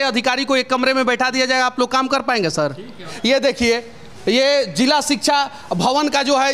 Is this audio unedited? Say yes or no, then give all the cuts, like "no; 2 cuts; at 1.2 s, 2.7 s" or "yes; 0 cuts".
no; 1 cut; at 3.1 s